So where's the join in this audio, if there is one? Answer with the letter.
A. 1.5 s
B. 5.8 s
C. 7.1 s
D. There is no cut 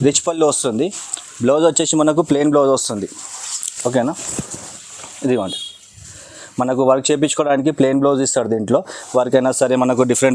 D